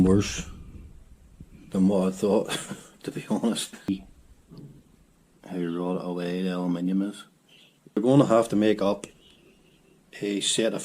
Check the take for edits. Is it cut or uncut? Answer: cut